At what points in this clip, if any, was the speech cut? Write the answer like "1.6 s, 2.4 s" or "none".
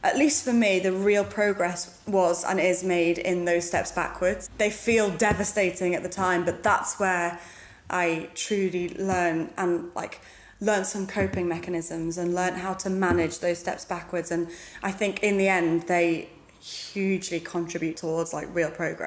4.5 s, 18.0 s